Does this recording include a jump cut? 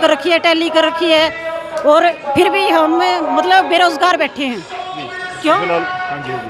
no; 0 cuts

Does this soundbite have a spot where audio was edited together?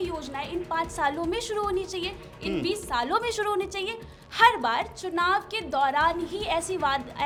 no; 0 cuts

